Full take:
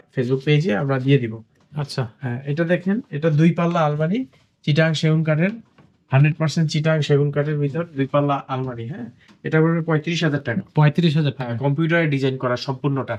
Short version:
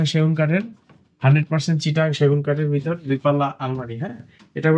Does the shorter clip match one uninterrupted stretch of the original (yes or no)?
yes